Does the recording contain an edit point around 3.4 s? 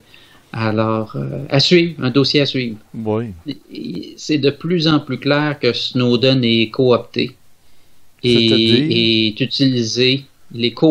yes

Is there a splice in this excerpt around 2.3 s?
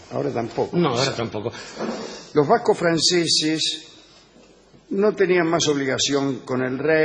no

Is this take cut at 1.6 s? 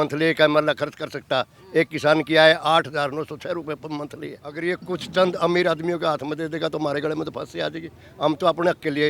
no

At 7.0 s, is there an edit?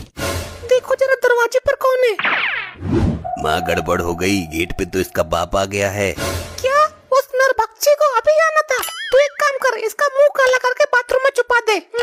no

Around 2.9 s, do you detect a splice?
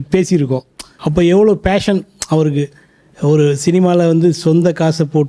no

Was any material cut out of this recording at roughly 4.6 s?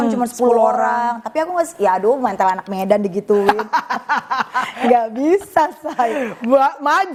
no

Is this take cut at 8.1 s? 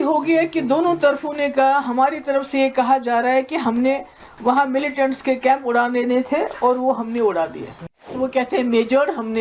yes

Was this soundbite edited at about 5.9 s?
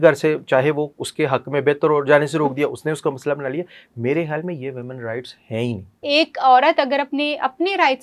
yes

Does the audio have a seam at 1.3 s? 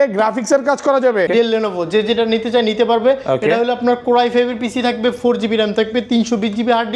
yes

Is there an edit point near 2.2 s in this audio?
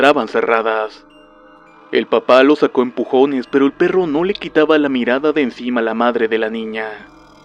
yes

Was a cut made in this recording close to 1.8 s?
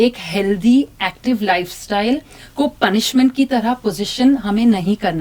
no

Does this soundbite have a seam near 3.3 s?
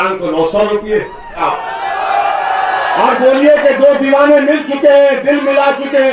no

